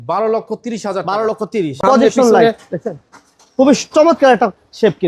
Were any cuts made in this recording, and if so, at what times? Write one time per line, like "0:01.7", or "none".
0:01.7

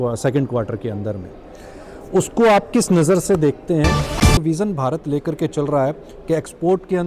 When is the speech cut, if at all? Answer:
0:04.4

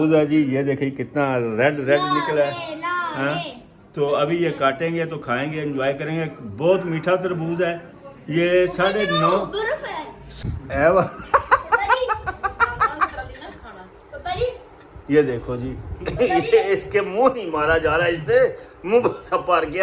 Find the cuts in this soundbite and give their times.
0:10.2

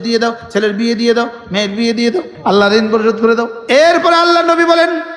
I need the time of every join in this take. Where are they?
0:02.3
0:03.6

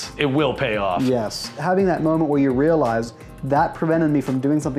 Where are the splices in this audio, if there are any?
0:01.5

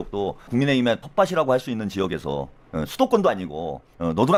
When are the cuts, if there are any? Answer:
none

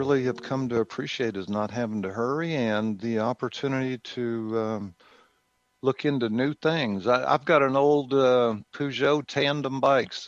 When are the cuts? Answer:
none

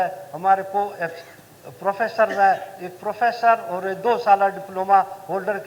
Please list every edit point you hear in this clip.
none

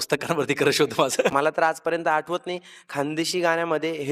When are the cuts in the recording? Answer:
0:01.3

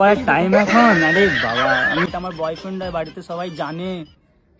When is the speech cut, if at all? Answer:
0:02.1

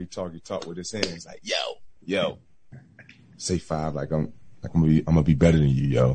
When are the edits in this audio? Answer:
none

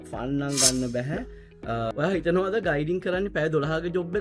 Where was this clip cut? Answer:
0:01.9

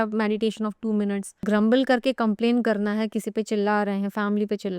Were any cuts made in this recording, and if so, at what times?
0:01.4

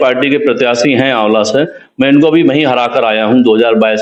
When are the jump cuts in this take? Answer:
none

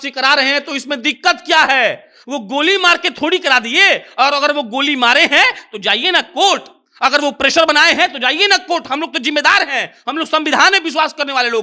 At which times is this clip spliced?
none

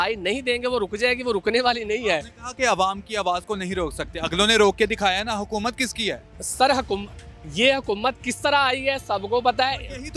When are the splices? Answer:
none

